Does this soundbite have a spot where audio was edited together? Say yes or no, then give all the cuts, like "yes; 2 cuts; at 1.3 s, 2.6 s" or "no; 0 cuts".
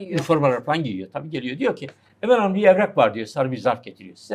no; 0 cuts